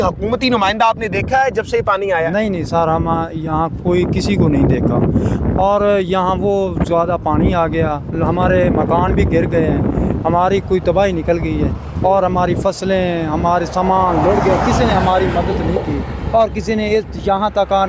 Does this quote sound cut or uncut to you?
uncut